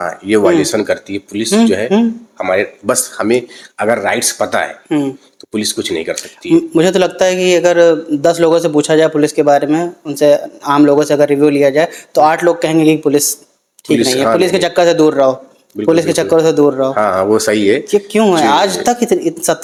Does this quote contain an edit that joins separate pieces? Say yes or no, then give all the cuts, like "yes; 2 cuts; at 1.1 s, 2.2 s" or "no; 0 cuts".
no; 0 cuts